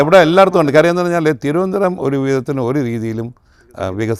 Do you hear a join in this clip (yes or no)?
no